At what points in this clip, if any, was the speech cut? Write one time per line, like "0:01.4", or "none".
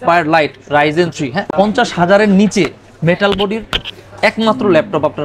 0:01.4